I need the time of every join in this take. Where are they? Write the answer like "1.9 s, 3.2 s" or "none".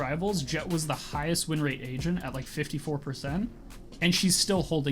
none